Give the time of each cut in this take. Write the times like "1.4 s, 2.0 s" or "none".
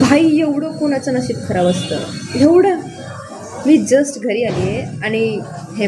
none

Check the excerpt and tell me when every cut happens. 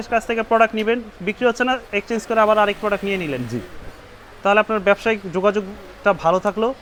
none

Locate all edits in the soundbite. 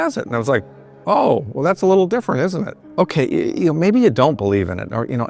0.9 s, 2.8 s

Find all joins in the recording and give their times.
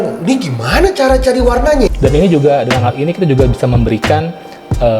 1.9 s

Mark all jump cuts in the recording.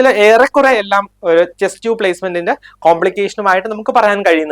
none

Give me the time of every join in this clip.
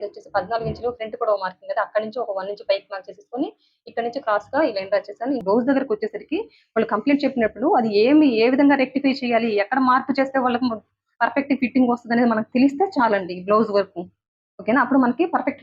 5.4 s

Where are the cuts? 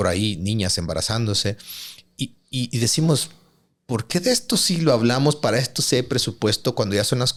none

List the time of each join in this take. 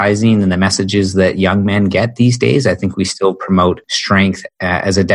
3.9 s

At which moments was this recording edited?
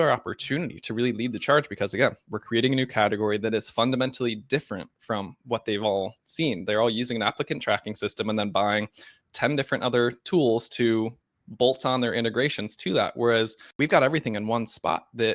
13.6 s

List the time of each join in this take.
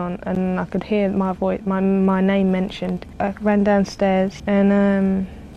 3.1 s

